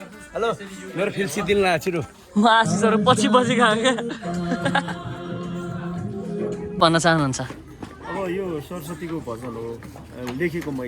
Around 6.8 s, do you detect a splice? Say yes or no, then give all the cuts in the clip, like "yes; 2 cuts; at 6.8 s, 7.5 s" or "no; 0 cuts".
yes; 1 cut; at 6.8 s